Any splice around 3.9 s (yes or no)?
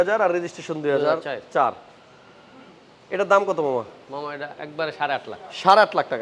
no